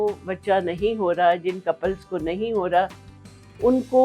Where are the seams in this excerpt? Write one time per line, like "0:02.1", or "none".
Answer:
none

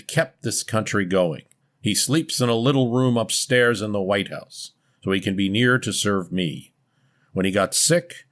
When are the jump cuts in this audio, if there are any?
none

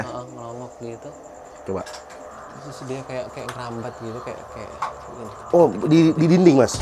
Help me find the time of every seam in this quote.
none

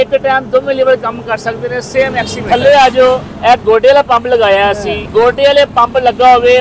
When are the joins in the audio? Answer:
0:02.4
0:03.3
0:04.9

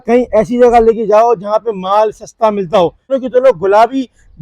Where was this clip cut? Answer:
0:03.2

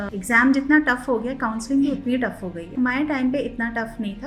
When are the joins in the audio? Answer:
none

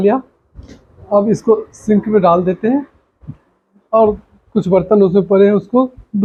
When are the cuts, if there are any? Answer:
none

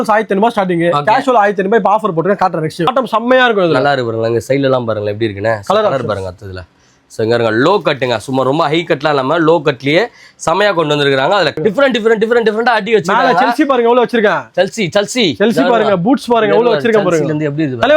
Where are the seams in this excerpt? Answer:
0:02.9
0:11.6

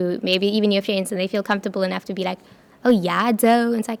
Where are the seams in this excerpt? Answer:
none

